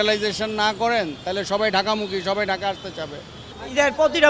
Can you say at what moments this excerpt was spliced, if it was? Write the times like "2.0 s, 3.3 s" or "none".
3.4 s